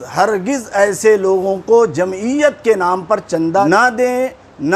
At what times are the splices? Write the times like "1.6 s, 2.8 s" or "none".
3.6 s